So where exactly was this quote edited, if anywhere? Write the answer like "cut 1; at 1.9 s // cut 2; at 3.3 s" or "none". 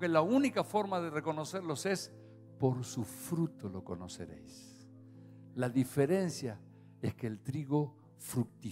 none